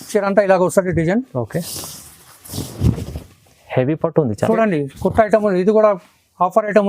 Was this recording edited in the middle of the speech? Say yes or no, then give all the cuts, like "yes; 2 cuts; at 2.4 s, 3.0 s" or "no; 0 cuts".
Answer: yes; 1 cut; at 4.5 s